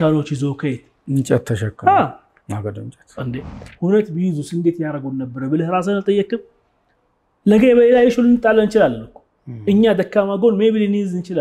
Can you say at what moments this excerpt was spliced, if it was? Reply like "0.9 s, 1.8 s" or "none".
3.4 s